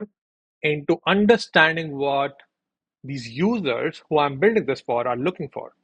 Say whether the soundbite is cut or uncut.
uncut